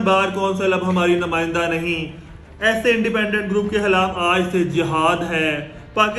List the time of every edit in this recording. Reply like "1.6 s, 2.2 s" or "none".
none